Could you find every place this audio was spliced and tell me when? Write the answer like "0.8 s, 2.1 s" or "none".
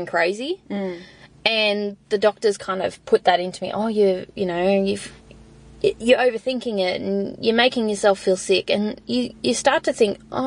none